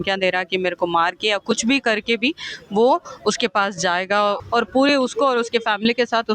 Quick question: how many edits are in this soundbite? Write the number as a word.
one